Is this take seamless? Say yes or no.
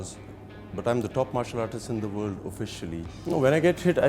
no